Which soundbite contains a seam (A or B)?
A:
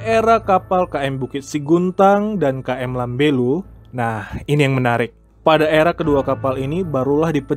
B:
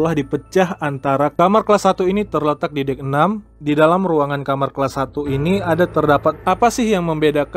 B